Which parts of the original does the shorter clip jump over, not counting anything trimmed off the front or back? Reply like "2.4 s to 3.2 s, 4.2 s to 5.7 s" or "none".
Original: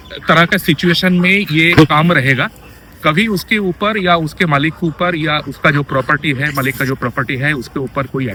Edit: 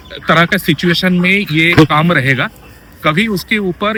none